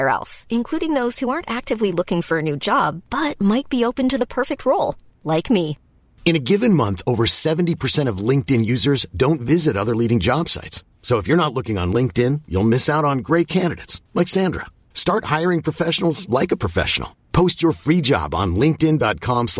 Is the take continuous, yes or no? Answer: yes